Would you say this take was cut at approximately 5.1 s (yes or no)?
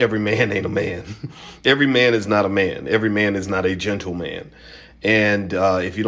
no